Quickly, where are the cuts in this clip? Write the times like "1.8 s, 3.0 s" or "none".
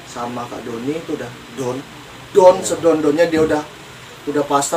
none